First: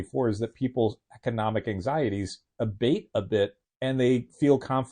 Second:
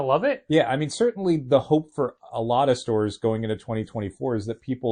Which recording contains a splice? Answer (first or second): first